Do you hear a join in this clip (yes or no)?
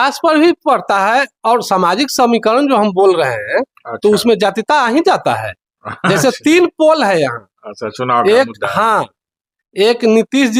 no